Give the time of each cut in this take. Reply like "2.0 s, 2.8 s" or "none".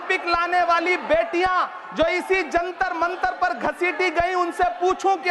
none